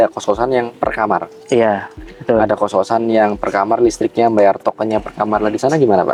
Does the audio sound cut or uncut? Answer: uncut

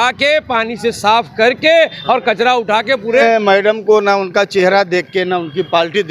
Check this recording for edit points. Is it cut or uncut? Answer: cut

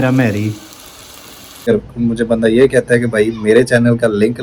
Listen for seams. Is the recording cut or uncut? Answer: cut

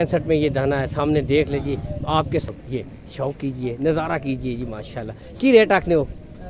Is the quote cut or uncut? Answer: cut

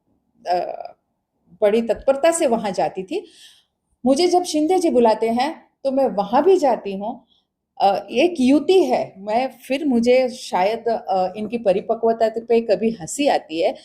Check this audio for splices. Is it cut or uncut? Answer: cut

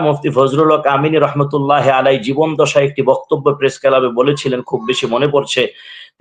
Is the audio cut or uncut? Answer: uncut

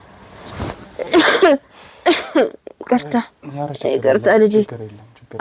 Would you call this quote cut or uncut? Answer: uncut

